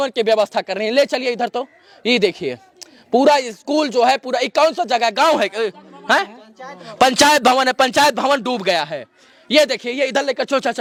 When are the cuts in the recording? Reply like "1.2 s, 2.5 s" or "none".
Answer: none